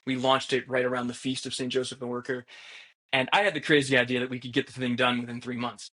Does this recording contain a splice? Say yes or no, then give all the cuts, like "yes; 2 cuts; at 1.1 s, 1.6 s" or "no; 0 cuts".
no; 0 cuts